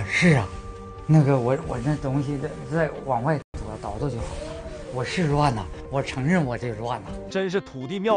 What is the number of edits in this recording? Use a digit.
1